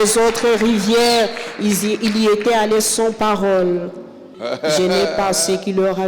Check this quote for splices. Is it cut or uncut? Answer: cut